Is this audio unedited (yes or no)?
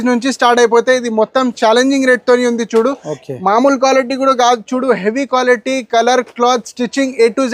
yes